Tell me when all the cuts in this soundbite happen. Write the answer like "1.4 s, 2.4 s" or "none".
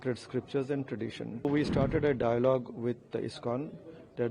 1.4 s